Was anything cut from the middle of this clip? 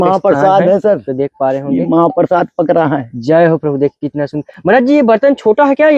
no; 0 cuts

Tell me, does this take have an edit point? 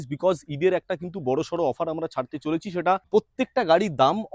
yes; 1 cut; at 3.1 s

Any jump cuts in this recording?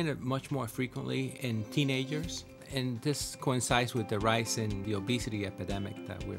yes; 3 cuts; at 1.3 s, 2.6 s, 4.8 s

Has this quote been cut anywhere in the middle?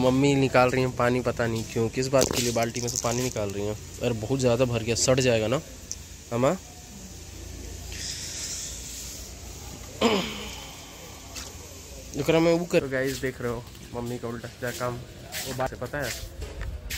yes; 2 cuts; at 12.8 s, 15.7 s

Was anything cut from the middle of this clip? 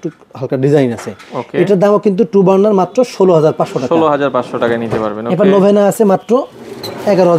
no; 0 cuts

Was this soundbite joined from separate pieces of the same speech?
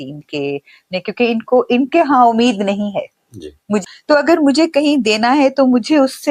yes; 1 cut; at 3.8 s

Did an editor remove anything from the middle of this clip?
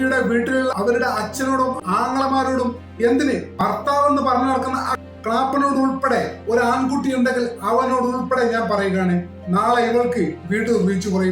yes; 3 cuts; at 0.7 s, 1.8 s, 3.5 s

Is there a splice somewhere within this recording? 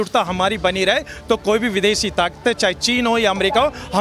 no; 0 cuts

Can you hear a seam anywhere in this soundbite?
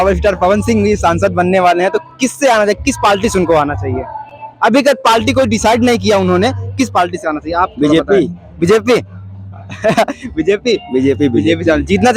no; 0 cuts

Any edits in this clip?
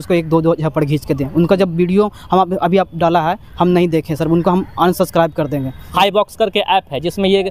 yes; 1 cut; at 5.8 s

